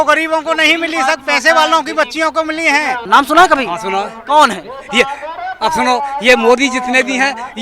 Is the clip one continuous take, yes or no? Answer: no